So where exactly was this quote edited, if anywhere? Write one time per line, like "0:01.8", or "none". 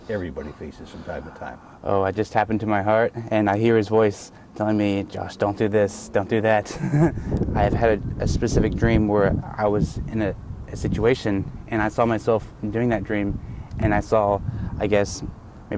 0:07.2